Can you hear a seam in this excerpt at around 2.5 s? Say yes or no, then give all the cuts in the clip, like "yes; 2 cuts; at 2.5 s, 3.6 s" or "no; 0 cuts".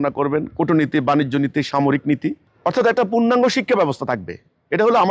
yes; 1 cut; at 2.5 s